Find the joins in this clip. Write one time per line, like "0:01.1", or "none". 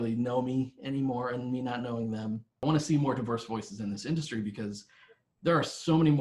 0:02.6